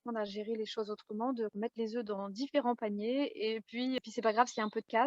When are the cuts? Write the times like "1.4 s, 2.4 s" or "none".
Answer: 4.0 s